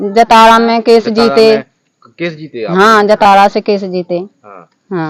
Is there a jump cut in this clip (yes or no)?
no